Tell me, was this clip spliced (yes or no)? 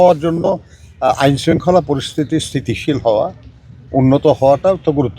no